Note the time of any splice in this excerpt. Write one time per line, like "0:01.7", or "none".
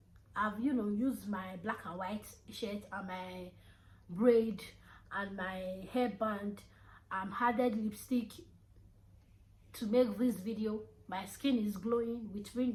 none